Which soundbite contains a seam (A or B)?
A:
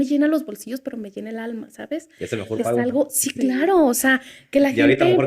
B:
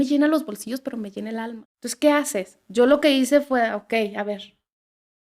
B